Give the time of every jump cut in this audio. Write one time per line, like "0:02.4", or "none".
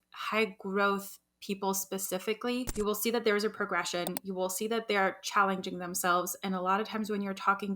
0:02.7